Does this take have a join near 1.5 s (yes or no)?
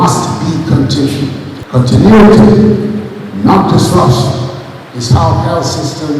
yes